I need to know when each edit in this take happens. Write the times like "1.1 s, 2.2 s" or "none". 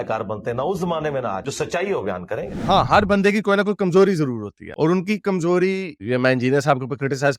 2.5 s